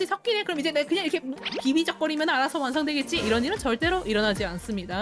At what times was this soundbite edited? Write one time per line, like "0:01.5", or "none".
none